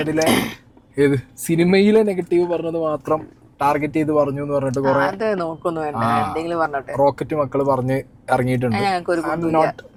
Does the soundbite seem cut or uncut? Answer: uncut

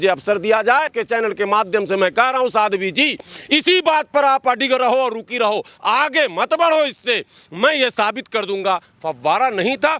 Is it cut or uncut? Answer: cut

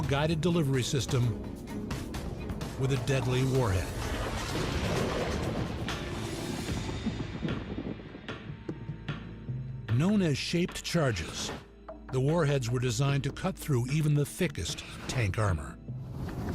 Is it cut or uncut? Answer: cut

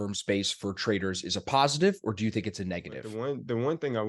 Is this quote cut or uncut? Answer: cut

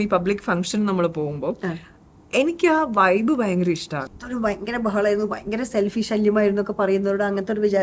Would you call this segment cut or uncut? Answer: cut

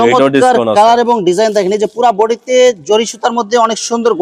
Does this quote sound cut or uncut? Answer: uncut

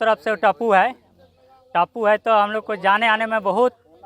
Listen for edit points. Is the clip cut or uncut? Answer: uncut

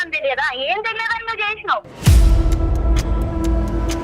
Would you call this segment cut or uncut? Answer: cut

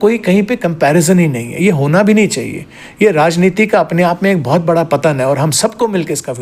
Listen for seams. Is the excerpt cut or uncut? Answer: uncut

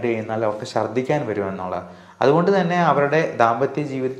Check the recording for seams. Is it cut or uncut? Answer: uncut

